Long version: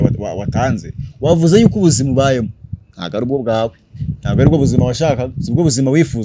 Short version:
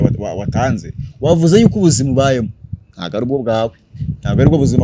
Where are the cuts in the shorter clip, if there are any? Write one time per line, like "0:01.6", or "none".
none